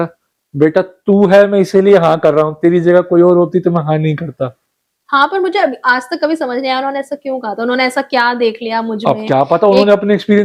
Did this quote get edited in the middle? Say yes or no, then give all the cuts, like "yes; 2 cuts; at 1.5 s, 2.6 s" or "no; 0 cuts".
no; 0 cuts